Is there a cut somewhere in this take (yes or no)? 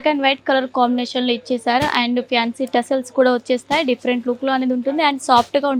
no